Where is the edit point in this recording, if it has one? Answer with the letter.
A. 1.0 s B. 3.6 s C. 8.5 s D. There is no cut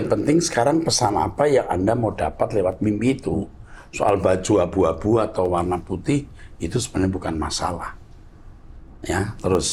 D